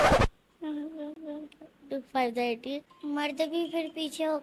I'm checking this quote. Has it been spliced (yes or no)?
yes